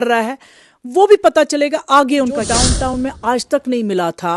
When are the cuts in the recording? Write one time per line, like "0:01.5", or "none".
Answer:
0:02.6